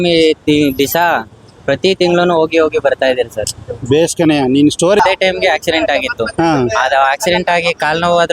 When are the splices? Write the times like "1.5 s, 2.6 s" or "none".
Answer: 5.0 s